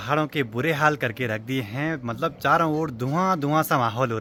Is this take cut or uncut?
uncut